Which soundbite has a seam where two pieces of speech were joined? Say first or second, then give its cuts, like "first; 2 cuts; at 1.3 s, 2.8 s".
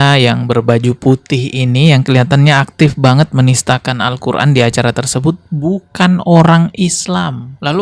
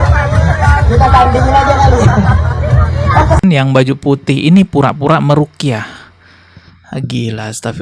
second; 1 cut; at 3.4 s